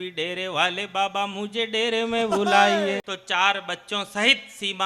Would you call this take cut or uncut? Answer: cut